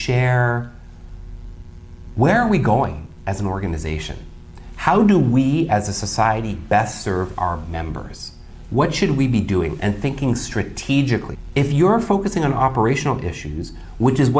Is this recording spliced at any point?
yes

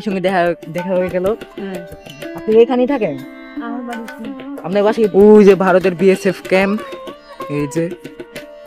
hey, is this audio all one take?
no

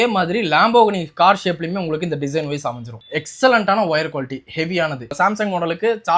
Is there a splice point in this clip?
yes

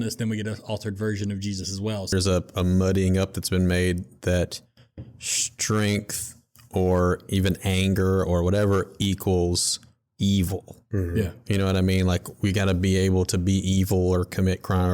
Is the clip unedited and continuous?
no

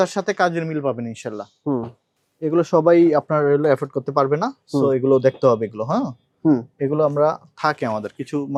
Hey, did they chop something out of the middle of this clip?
no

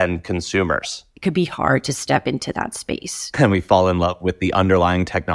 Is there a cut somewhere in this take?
yes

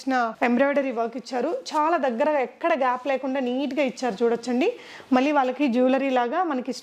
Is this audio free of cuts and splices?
yes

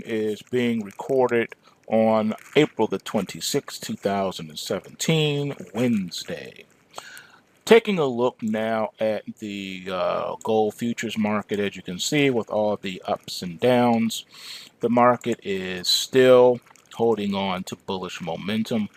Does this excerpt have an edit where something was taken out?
yes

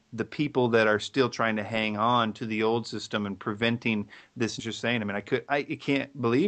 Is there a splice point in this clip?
no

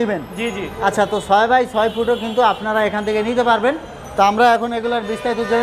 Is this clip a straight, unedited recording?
yes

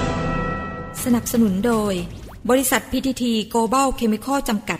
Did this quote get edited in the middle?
yes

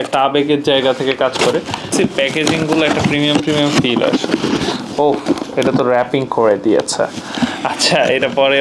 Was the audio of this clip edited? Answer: yes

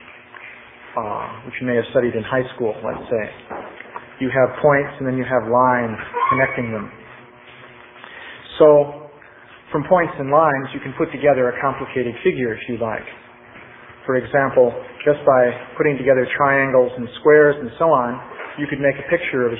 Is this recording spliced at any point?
yes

